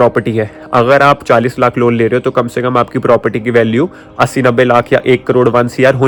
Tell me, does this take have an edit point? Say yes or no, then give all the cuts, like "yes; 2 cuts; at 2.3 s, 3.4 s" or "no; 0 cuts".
no; 0 cuts